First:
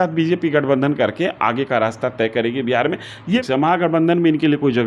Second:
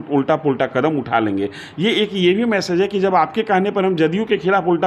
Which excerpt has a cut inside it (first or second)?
first